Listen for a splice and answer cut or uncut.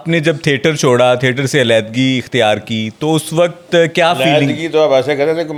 uncut